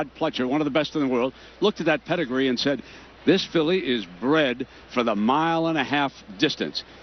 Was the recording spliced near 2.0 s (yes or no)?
yes